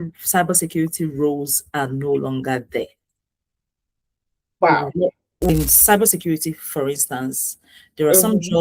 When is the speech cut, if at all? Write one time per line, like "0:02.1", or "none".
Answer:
0:05.5